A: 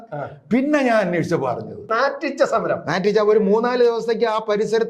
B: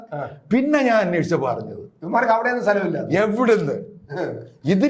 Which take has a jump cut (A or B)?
A